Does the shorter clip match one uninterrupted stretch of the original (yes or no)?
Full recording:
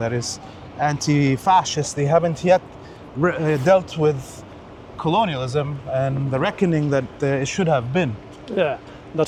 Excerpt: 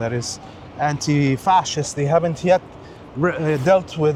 yes